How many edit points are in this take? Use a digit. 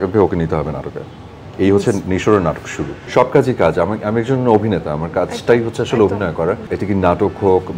2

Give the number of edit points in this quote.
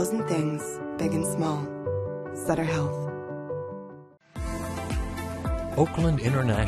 1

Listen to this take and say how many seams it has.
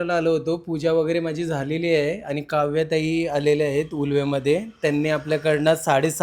0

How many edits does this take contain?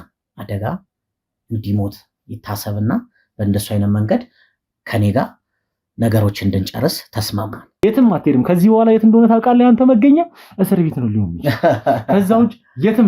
1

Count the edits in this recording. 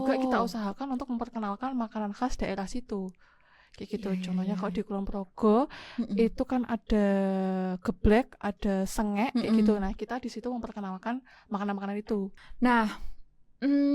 1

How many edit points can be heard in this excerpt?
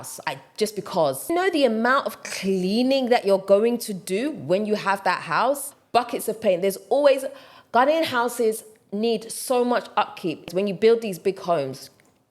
3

